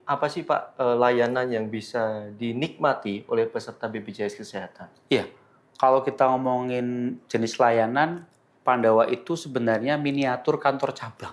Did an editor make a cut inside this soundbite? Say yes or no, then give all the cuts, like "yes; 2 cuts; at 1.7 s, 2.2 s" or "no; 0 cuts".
no; 0 cuts